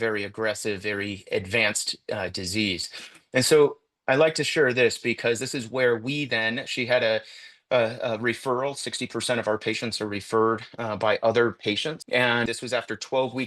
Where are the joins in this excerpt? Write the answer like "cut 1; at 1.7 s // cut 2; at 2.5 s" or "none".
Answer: cut 1; at 12.3 s